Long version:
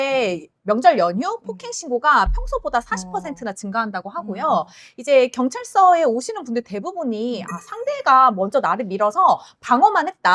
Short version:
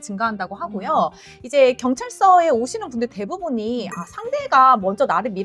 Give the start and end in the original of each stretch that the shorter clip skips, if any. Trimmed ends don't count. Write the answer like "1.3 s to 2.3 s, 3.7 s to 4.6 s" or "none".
none